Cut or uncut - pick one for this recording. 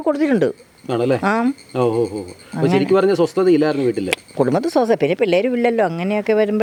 uncut